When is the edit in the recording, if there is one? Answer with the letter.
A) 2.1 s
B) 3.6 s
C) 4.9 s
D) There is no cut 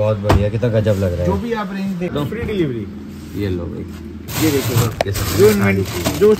A